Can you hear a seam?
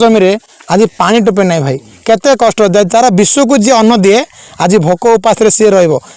no; 0 cuts

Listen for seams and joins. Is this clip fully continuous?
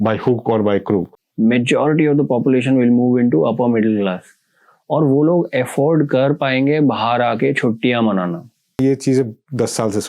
no; 2 cuts; at 1.2 s, 8.8 s

